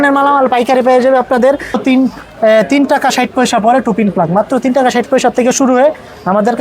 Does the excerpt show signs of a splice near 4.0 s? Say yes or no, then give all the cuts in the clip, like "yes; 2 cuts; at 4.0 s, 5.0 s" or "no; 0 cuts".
no; 1 cut; at 1.8 s